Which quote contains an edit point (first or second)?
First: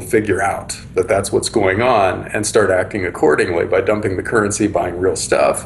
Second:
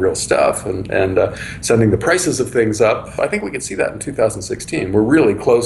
second